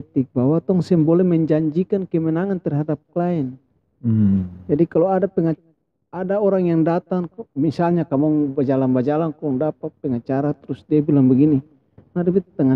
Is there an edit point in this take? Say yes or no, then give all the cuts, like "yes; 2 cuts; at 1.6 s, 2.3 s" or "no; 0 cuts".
no; 0 cuts